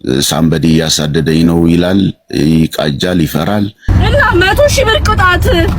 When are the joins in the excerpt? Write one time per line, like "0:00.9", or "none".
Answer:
0:03.8